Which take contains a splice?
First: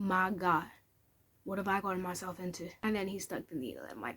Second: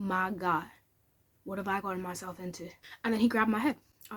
first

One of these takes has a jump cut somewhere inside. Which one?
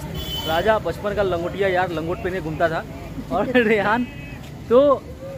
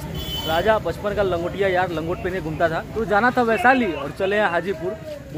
second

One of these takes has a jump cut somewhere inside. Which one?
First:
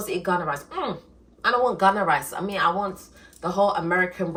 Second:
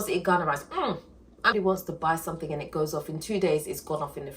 second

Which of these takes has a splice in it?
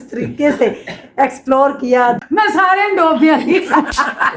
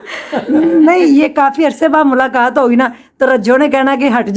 first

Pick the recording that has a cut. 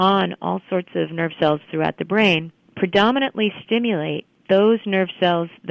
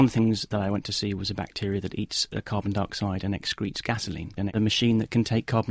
second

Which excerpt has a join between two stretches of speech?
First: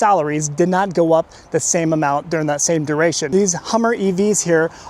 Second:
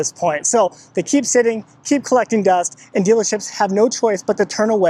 first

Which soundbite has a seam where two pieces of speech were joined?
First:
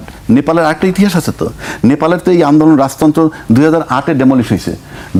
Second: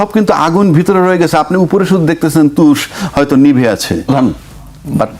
second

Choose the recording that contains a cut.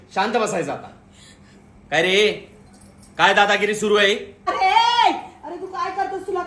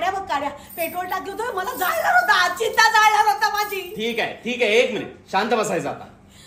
first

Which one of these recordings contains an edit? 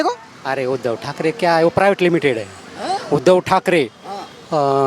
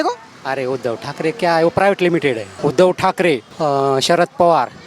second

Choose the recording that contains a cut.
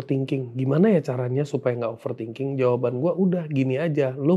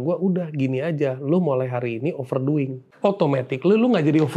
second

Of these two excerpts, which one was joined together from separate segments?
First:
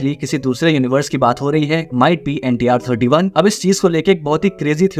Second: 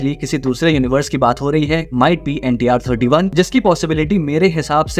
first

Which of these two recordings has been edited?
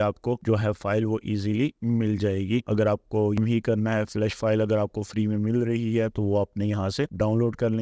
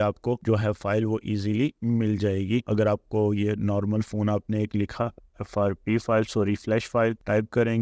first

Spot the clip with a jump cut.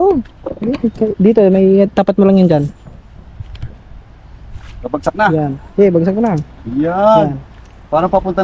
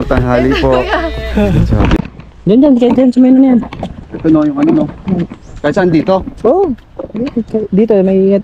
second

